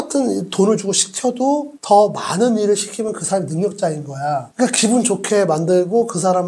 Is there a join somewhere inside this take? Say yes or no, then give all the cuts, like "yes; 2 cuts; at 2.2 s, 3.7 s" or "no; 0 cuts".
no; 0 cuts